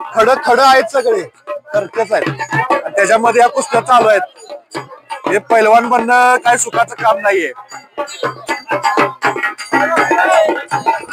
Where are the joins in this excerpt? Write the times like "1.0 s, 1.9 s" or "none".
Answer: none